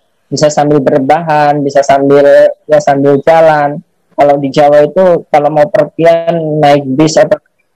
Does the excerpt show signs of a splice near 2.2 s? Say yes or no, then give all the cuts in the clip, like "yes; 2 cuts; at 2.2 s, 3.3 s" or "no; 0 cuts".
no; 0 cuts